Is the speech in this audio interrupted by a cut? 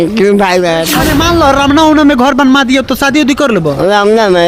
yes; 1 cut; at 1.0 s

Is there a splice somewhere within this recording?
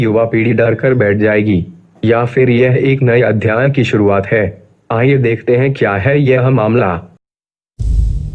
yes; 1 cut; at 7.2 s

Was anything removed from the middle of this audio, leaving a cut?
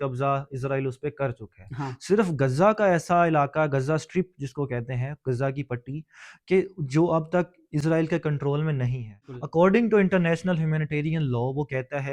yes; 1 cut; at 9.3 s

